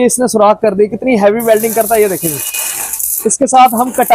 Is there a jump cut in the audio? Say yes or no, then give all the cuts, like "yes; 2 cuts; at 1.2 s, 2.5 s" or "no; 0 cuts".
no; 0 cuts